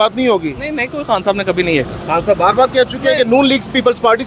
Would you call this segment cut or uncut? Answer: uncut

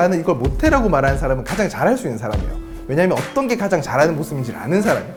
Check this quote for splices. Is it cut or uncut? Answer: uncut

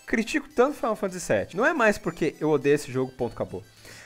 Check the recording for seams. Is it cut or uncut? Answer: cut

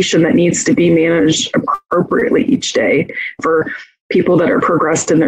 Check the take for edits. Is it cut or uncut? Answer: cut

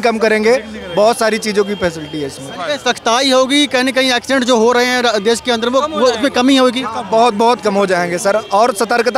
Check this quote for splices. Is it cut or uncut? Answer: uncut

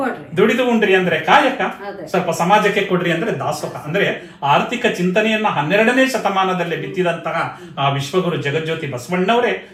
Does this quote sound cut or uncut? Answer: uncut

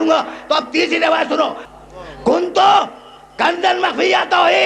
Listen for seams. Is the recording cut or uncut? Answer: cut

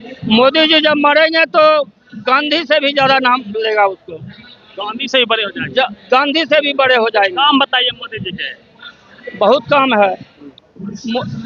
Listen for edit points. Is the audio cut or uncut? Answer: uncut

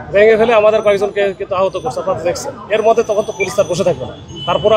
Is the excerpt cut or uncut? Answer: uncut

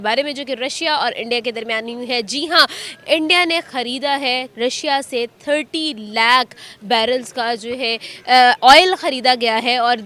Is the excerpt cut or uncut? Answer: uncut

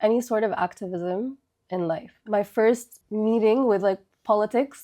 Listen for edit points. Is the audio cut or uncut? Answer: cut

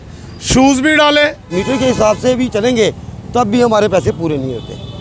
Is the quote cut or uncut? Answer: cut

